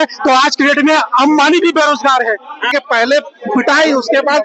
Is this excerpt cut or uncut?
cut